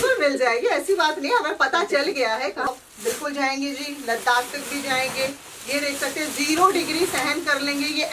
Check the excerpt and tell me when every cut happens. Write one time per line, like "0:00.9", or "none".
0:02.7